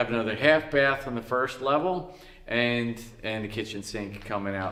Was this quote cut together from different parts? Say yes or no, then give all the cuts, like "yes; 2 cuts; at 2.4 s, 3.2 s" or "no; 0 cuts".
no; 0 cuts